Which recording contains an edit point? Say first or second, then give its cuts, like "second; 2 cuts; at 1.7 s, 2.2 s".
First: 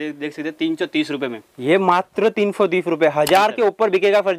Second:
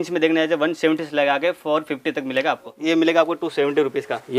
second; 1 cut; at 2.7 s